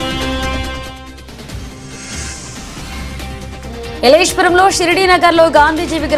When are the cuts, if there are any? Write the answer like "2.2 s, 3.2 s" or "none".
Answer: 1.8 s, 3.4 s